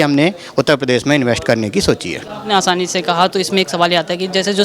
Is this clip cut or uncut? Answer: uncut